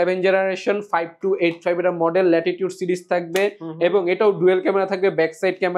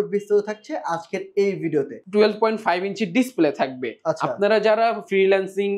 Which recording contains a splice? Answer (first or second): second